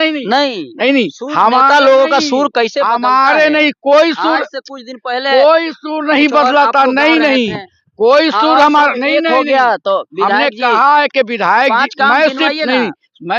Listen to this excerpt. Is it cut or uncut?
uncut